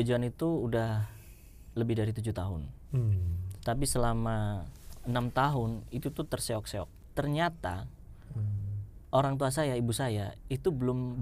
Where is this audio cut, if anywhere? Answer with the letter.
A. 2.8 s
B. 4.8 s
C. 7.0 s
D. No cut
C